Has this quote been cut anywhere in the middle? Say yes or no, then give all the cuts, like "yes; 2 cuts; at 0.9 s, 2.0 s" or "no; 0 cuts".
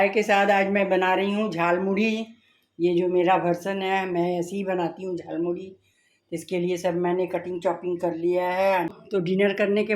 yes; 1 cut; at 8.9 s